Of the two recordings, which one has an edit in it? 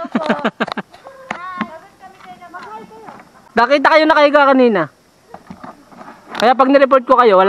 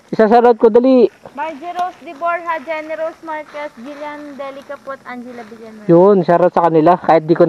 first; 1 cut; at 3.3 s

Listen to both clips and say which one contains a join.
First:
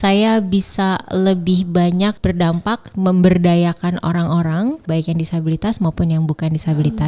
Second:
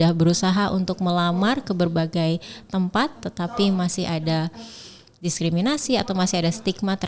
first; 2 cuts; at 2.2 s, 4.8 s

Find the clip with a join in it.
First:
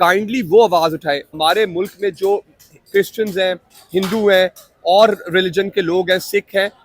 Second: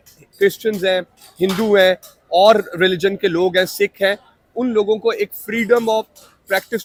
first; 1 cut; at 1.3 s

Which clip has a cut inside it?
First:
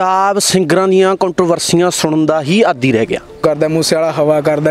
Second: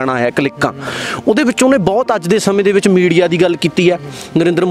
first; 1 cut; at 3.4 s

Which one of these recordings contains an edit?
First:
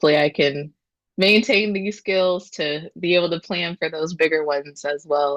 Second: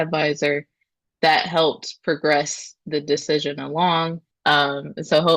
second; 1 cut; at 4.2 s

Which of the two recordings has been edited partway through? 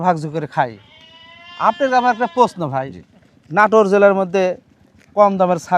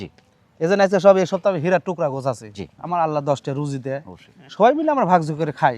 second; 1 cut; at 2.7 s

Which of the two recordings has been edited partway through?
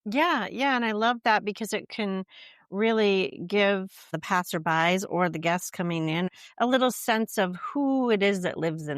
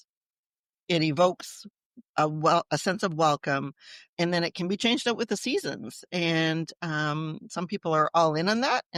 first; 2 cuts; at 4.1 s, 6.4 s

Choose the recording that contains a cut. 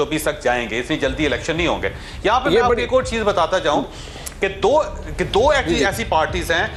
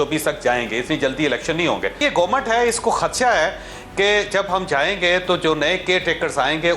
second; 1 cut; at 2.0 s

